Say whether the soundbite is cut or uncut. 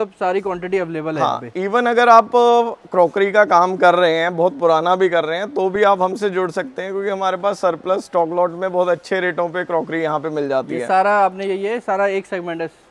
uncut